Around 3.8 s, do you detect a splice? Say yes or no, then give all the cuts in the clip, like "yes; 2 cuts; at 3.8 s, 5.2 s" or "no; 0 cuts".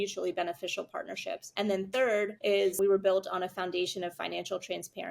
no; 2 cuts; at 1.4 s, 2.5 s